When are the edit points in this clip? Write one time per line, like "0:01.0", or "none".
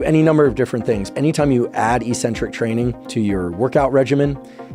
0:01.1
0:03.0

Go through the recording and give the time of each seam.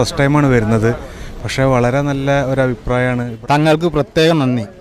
0:03.3

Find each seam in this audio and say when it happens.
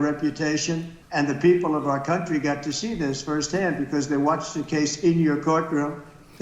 0:01.0

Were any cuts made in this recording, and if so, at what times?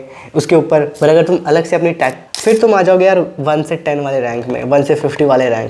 0:02.2

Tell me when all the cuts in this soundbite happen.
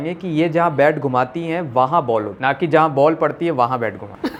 none

